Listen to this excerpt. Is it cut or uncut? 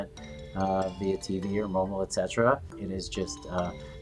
cut